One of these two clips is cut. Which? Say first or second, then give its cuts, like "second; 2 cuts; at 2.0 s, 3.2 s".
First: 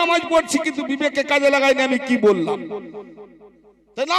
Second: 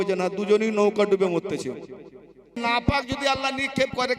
second; 1 cut; at 2.6 s